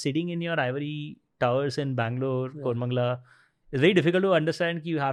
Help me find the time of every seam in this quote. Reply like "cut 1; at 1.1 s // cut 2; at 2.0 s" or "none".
none